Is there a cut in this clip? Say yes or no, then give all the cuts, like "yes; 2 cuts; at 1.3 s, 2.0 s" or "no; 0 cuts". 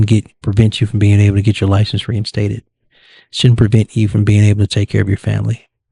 no; 0 cuts